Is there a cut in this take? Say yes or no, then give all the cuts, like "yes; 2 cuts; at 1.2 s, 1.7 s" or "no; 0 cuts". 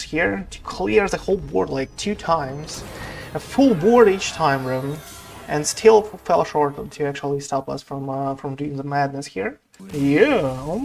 yes; 1 cut; at 9.7 s